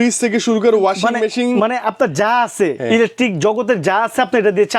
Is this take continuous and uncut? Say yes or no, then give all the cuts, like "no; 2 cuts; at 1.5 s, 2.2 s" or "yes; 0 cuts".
yes; 0 cuts